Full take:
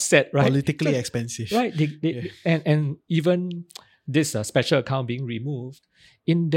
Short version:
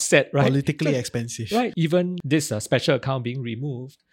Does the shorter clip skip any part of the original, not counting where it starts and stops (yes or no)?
yes